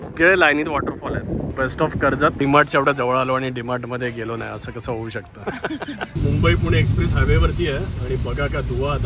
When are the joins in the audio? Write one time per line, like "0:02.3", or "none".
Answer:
0:01.5
0:02.4
0:06.1